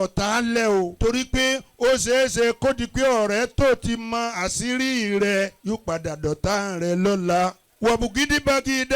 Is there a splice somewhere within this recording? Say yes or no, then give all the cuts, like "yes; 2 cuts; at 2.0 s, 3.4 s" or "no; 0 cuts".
yes; 3 cuts; at 0.9 s, 5.6 s, 7.6 s